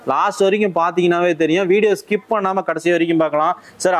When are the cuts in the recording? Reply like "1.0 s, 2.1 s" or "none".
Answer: none